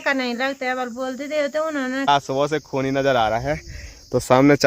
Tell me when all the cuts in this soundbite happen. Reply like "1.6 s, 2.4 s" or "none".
2.1 s